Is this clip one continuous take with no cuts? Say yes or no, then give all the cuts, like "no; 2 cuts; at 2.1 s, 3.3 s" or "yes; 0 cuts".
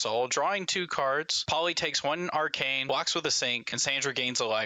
no; 3 cuts; at 1.3 s, 2.8 s, 3.7 s